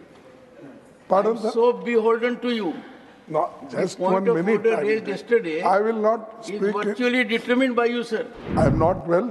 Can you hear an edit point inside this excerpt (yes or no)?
yes